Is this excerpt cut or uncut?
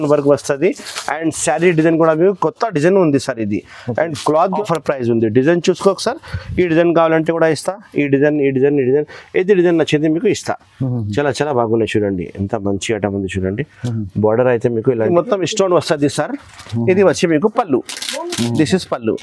cut